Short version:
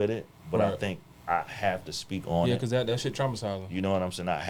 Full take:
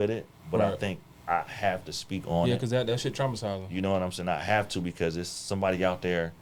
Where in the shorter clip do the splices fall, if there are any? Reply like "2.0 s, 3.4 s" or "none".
none